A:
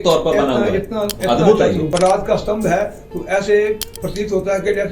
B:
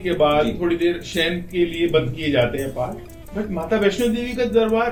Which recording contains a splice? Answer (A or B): A